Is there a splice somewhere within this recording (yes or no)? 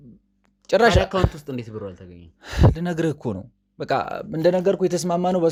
no